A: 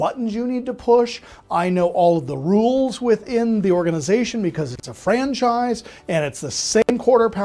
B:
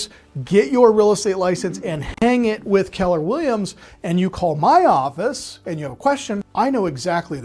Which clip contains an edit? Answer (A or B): B